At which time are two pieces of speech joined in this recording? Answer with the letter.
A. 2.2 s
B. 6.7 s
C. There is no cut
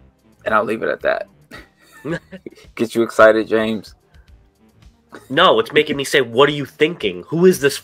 A